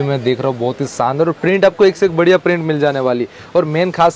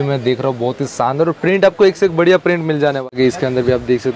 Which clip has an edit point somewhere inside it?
second; 1 cut; at 3.1 s

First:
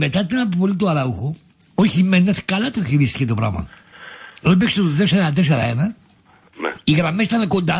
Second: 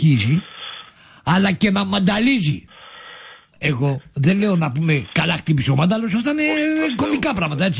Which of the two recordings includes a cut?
first; 1 cut; at 5.5 s

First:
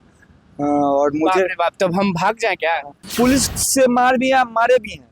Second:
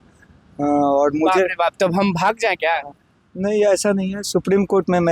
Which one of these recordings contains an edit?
first; 1 cut; at 3.0 s

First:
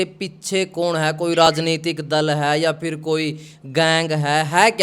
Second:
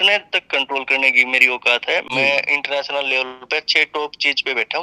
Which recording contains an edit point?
second; 1 cut; at 2.1 s

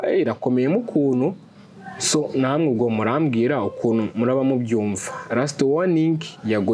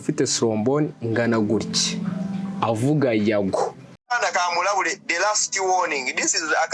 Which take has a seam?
second; 1 cut; at 4.1 s

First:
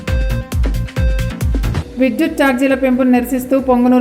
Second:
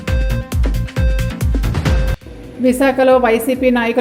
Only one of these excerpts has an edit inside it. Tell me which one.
second; 1 cut; at 1.8 s

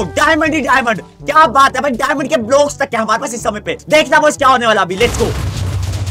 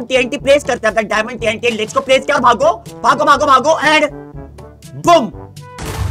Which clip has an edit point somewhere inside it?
first; 2 cuts; at 1.0 s, 3.7 s

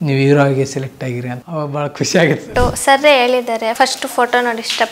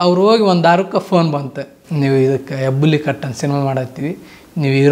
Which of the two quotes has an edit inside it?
first; 3 cuts; at 1.3 s, 2.5 s, 3.7 s

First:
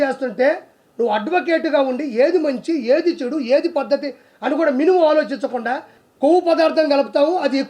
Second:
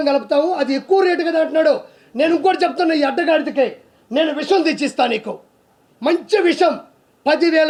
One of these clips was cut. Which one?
first; 1 cut; at 5.9 s

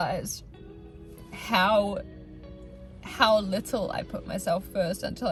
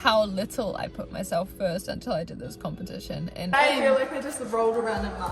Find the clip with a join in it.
second; 1 cut; at 3.5 s

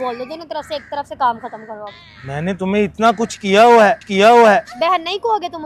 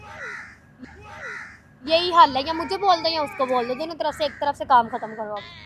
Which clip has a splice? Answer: first; 1 cut; at 4.7 s

